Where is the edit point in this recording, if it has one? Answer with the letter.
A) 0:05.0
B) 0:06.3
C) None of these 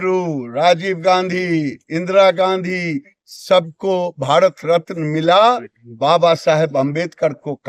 C